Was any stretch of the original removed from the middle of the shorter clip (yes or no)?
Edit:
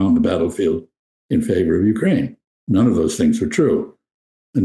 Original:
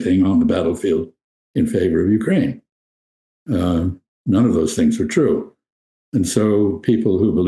yes